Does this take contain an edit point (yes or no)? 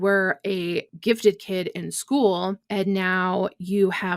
yes